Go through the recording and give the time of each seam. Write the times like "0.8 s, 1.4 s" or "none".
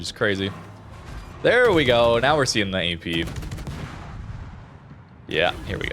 3.3 s